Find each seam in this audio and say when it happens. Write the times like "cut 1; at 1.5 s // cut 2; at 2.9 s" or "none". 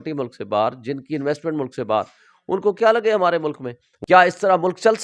cut 1; at 3.9 s